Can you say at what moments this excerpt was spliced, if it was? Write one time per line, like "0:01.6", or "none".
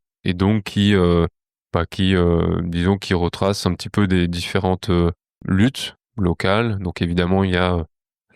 none